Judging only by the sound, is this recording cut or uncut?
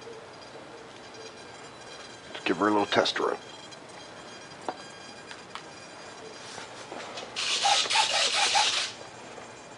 cut